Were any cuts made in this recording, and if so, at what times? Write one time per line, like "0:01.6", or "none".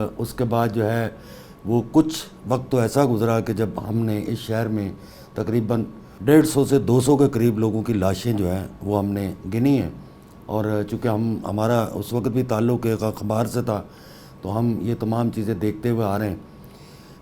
0:06.0